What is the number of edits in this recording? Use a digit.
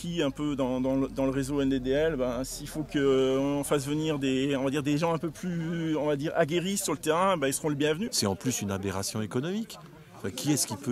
1